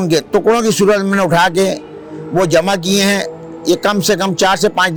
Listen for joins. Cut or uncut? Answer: uncut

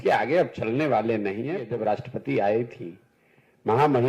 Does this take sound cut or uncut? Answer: cut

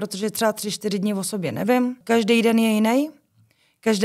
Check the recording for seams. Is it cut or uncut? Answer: cut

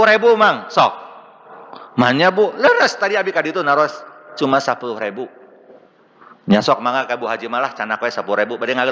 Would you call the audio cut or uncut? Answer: uncut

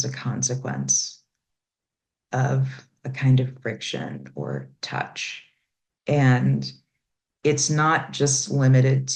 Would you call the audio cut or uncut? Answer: uncut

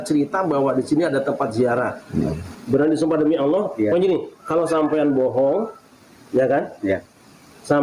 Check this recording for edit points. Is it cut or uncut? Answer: cut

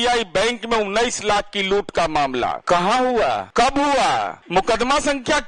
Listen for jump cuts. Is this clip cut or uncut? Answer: cut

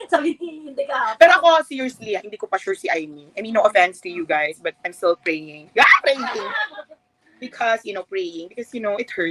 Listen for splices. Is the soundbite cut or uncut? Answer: uncut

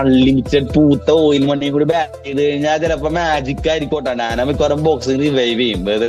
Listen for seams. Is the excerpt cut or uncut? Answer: uncut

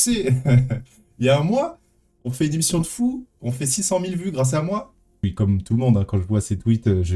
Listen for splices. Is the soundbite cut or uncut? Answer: cut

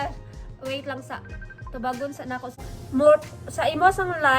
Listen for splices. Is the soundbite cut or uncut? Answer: cut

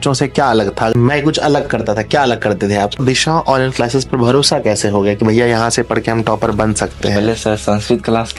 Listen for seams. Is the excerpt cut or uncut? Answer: cut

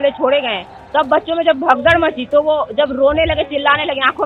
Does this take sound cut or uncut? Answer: uncut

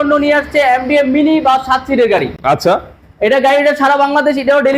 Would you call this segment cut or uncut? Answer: uncut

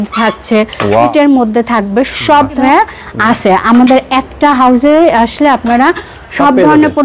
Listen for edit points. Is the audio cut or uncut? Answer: cut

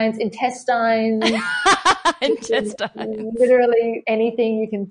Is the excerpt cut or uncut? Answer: cut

